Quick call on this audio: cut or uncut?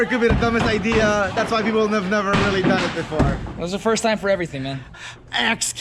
cut